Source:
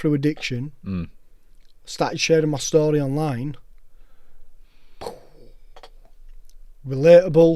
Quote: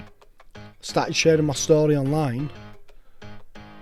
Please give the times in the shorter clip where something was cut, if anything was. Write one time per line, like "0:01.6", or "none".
none